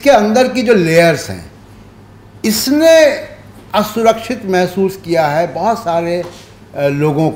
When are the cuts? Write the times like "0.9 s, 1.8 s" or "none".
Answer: none